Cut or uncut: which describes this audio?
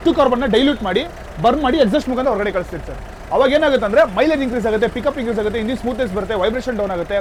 uncut